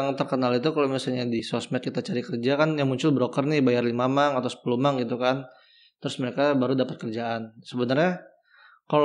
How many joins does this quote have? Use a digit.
1